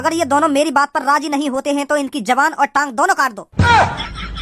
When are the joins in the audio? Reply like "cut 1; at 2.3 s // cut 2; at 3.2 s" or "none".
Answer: cut 1; at 3.4 s